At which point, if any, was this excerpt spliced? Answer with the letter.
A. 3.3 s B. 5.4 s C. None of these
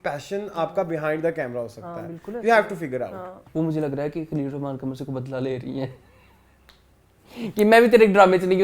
A